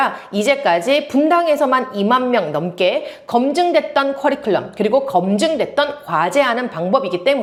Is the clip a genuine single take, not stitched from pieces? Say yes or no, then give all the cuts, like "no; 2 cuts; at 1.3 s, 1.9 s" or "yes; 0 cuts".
yes; 0 cuts